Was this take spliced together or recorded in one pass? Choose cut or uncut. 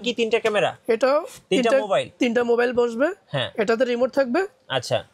uncut